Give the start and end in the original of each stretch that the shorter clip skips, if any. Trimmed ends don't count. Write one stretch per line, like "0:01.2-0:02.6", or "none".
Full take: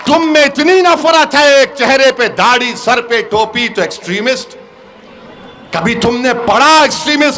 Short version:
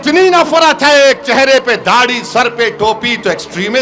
none